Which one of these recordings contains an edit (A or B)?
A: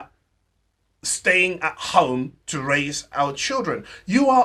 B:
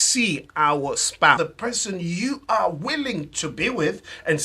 B